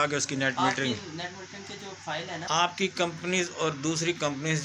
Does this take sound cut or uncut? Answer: cut